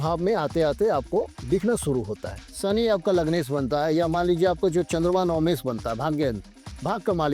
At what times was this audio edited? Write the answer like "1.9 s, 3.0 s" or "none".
2.5 s